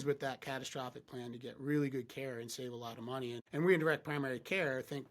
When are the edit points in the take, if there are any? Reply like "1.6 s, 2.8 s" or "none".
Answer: 3.4 s